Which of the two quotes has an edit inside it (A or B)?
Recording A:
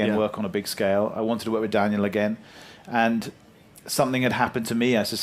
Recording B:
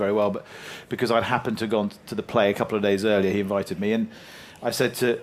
B